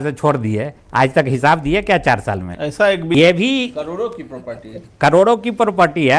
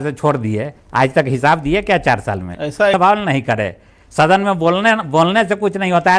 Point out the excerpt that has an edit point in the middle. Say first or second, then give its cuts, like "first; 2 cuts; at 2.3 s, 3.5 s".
second; 1 cut; at 2.9 s